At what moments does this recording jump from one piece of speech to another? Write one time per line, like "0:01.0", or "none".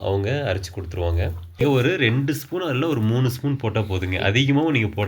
0:01.6